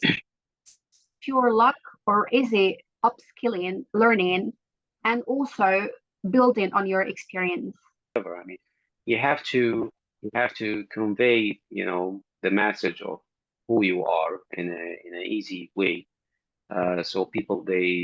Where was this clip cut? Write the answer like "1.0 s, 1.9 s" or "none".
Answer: 8.2 s